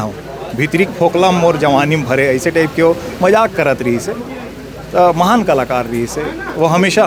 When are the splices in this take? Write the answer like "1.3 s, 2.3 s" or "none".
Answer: none